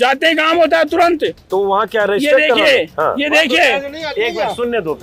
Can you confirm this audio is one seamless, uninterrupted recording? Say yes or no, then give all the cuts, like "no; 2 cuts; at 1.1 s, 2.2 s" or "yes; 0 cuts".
yes; 0 cuts